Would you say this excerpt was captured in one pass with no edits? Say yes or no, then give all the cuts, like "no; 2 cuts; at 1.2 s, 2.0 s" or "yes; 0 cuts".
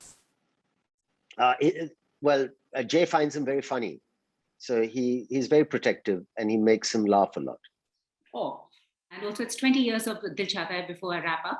no; 1 cut; at 9.2 s